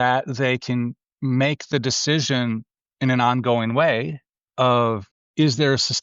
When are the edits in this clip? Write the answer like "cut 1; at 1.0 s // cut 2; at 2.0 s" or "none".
cut 1; at 1.1 s // cut 2; at 5.1 s